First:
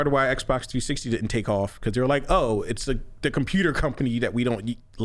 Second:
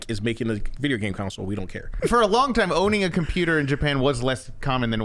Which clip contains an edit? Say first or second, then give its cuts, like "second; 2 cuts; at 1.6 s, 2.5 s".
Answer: second; 1 cut; at 1.9 s